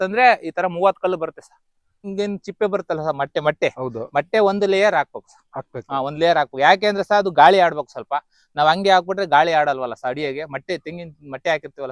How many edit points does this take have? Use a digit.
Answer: 1